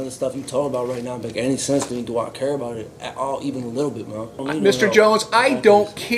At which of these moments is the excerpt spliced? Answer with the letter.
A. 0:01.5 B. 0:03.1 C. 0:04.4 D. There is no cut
C